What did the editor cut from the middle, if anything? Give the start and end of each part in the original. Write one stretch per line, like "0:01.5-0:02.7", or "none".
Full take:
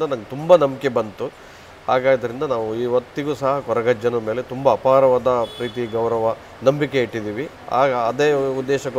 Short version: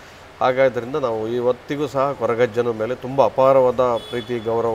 none

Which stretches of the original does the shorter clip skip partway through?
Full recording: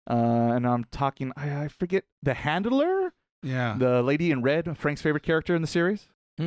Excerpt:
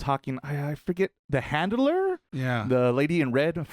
0:03.2-0:03.4

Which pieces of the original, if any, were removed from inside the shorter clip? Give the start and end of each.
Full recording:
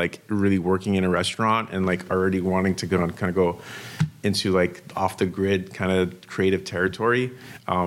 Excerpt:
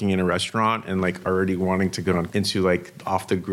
0:03.1-0:04.2

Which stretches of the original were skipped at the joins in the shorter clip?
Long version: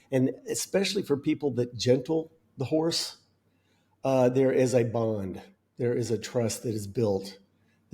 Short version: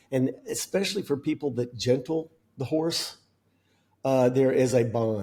none

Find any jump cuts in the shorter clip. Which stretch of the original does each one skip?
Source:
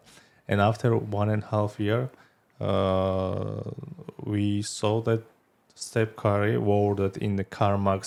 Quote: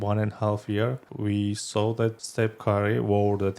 0:02.2-0:04.1
0:05.3-0:05.8

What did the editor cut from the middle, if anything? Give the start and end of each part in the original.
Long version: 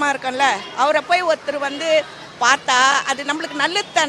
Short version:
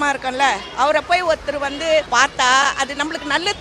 0:02.1-0:02.4

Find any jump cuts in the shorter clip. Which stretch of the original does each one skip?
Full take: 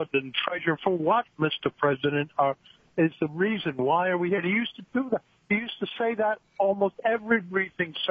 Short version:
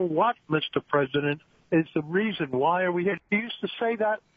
0:02.3-0:02.6
0:04.4-0:05.4

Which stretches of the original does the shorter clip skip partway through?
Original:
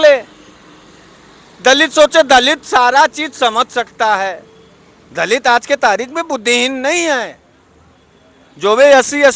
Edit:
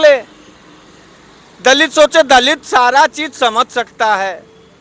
none

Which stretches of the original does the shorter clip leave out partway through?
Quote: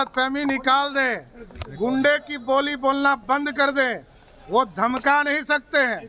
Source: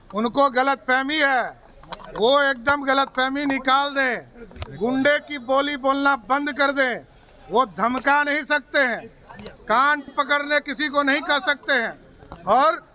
none

